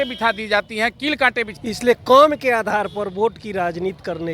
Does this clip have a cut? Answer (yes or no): yes